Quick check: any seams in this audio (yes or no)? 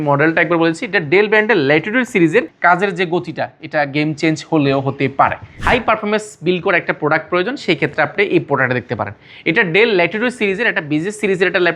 yes